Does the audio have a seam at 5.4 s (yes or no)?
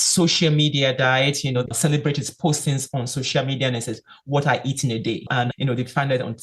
yes